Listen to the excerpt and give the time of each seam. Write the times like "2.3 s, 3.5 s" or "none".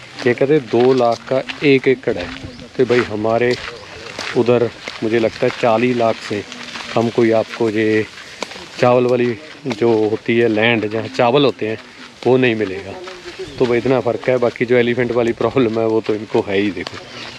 none